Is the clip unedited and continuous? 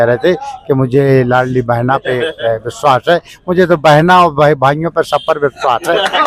yes; 0 cuts

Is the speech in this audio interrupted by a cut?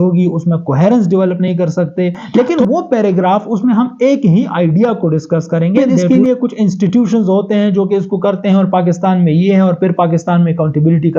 yes; 2 cuts; at 2.2 s, 5.9 s

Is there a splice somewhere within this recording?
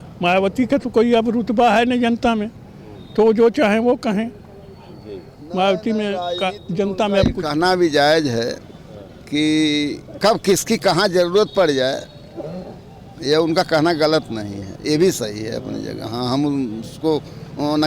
no; 0 cuts

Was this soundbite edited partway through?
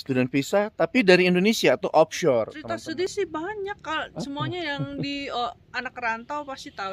yes; 1 cut; at 3.1 s

